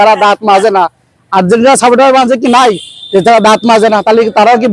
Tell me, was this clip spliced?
no; 0 cuts

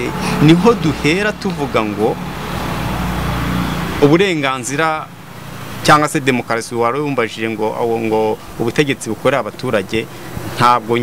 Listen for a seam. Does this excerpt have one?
no; 0 cuts

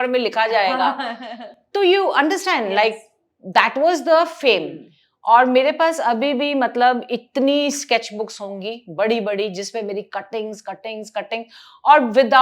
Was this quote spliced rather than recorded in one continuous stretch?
no; 0 cuts

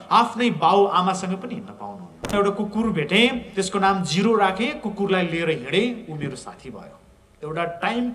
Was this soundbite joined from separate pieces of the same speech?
yes; 1 cut; at 2.3 s

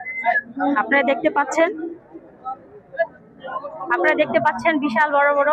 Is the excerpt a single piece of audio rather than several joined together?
yes; 0 cuts

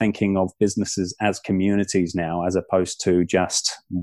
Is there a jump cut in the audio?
no; 0 cuts

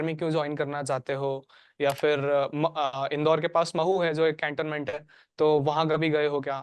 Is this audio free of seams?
yes; 0 cuts

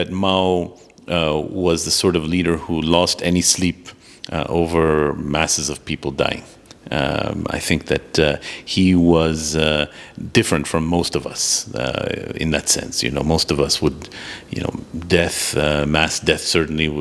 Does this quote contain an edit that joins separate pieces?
no; 0 cuts

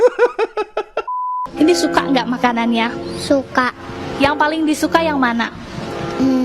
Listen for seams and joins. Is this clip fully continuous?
no; 1 cut; at 1.4 s

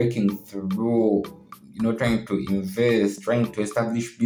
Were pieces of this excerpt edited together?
no; 0 cuts

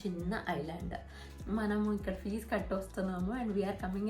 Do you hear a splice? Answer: yes; 1 cut; at 1.2 s

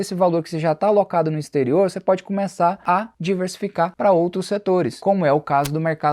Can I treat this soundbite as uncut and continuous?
no; 1 cut; at 4.9 s

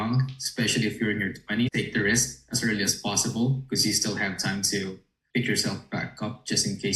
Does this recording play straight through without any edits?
yes; 0 cuts

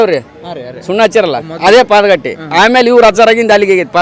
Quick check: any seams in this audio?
no; 0 cuts

